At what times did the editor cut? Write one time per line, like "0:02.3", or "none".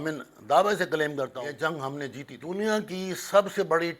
0:01.4
0:02.3

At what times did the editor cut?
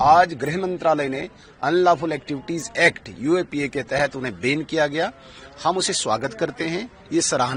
none

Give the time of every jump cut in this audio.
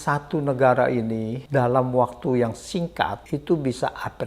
0:01.4
0:03.2

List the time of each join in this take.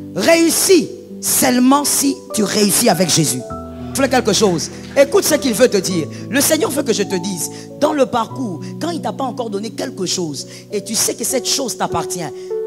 0:04.0

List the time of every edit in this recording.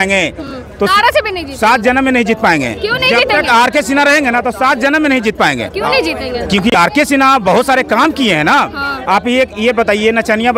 none

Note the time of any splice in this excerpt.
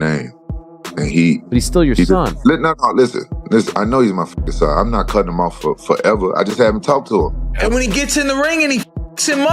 0:07.4

